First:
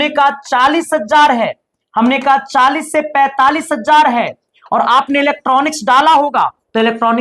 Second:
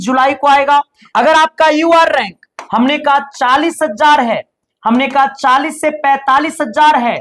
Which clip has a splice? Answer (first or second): second